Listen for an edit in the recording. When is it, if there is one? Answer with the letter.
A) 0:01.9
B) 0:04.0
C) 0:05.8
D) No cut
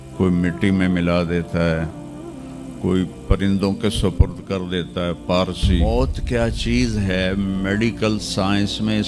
C